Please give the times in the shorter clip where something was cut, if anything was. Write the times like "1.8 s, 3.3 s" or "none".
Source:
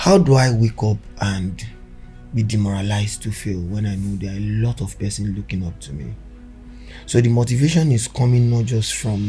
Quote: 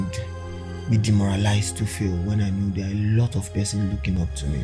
none